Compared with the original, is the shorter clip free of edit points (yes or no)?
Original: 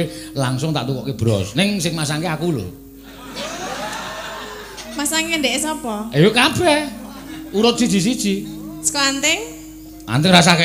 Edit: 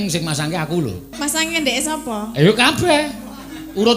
no